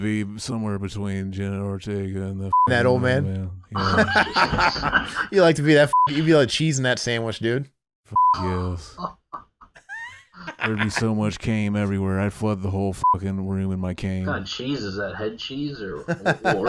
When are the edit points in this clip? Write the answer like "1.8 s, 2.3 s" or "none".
none